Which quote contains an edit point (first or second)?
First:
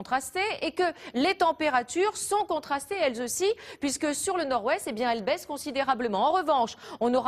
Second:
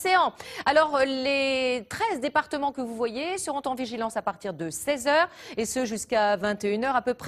second